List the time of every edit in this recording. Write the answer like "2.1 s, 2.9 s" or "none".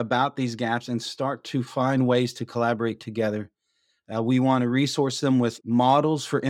none